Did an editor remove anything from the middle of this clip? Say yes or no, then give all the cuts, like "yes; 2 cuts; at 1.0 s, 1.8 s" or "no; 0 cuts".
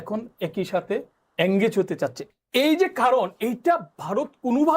yes; 1 cut; at 2.2 s